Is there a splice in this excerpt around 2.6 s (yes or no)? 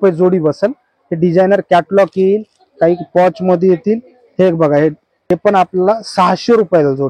no